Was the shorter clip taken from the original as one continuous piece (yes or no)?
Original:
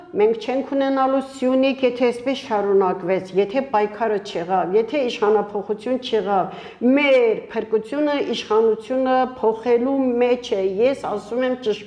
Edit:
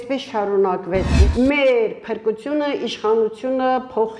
no